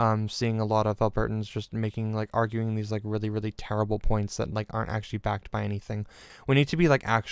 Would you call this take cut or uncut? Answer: cut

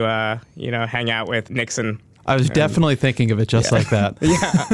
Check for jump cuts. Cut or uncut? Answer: cut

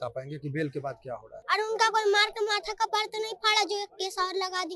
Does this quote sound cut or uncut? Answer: cut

